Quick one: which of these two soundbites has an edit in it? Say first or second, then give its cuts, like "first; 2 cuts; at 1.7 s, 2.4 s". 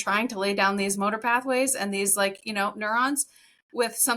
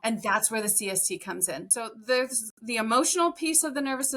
second; 1 cut; at 1.7 s